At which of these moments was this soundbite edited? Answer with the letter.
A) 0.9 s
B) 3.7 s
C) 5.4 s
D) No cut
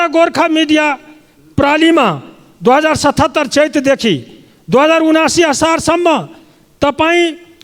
D